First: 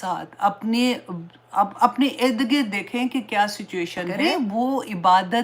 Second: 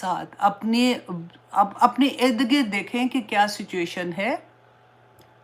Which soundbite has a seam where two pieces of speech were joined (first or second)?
first